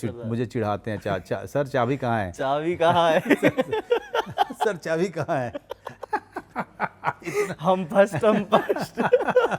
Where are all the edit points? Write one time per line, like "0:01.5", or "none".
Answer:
none